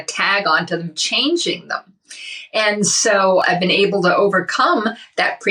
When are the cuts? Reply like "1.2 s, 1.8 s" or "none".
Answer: 3.4 s